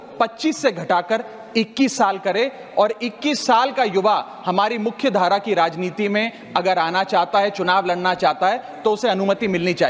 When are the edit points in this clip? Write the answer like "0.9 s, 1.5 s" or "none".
none